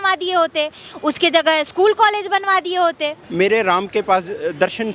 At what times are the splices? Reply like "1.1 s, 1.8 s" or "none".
3.2 s